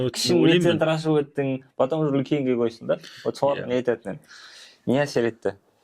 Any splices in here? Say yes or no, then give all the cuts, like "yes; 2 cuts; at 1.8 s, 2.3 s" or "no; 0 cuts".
no; 0 cuts